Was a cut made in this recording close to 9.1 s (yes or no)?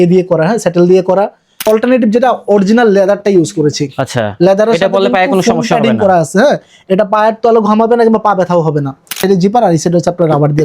yes